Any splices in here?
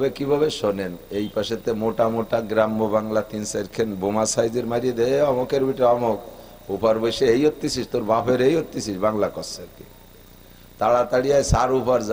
no; 0 cuts

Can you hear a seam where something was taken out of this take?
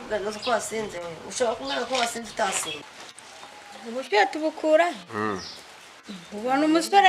yes; 1 cut; at 2.9 s

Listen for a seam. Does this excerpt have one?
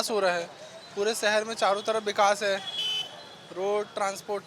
no; 0 cuts

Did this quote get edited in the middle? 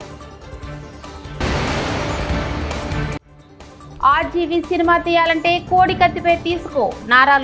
yes; 2 cuts; at 1.4 s, 3.3 s

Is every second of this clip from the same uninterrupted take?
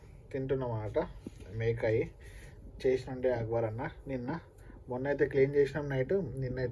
yes; 0 cuts

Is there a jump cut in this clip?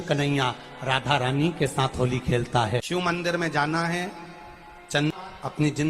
yes; 2 cuts; at 2.8 s, 5.1 s

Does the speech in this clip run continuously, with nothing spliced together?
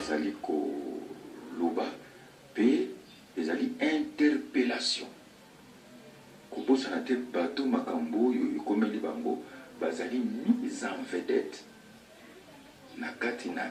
yes; 0 cuts

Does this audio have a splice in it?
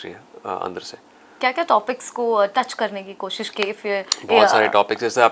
no; 0 cuts

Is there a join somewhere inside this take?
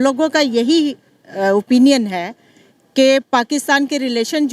no; 0 cuts

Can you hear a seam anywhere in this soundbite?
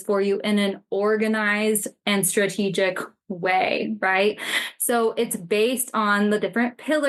no; 0 cuts

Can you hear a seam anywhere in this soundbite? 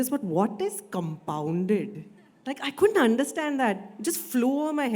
no; 0 cuts

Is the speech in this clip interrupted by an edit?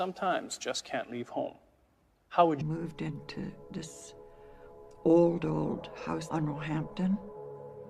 no; 0 cuts

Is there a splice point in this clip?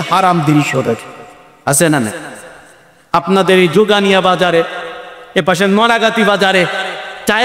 no; 0 cuts

